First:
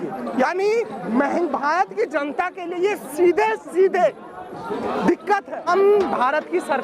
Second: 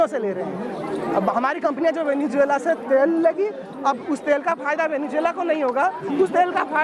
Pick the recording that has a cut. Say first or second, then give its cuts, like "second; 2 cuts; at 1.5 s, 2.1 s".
first; 1 cut; at 5.6 s